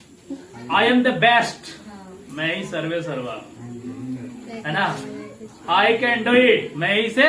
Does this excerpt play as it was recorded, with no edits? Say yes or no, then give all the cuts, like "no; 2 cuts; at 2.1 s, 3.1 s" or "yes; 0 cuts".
yes; 0 cuts